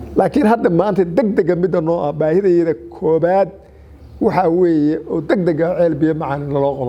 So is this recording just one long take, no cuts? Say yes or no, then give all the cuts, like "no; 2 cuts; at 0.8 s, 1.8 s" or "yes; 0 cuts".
yes; 0 cuts